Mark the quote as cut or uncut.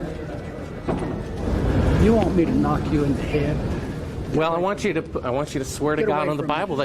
cut